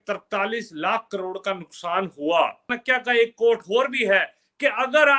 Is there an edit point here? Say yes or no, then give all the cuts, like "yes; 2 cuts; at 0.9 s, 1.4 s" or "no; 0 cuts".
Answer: yes; 1 cut; at 2.7 s